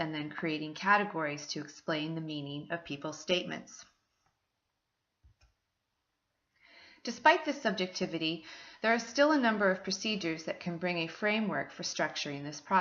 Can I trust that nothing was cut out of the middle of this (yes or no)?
no